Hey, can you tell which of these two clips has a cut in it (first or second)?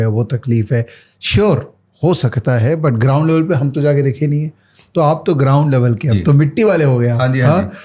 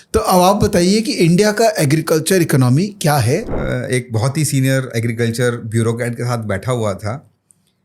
second